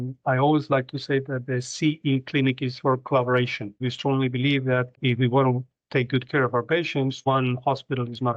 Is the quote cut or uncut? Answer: cut